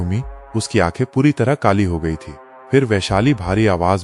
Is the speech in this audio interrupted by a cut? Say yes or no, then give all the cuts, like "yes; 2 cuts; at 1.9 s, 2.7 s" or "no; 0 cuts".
no; 0 cuts